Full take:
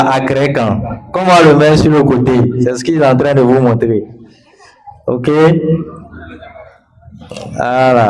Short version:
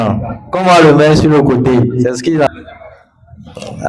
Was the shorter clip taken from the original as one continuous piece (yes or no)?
no